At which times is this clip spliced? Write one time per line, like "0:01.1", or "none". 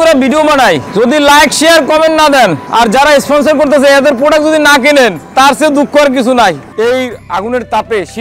0:00.9
0:02.6
0:06.6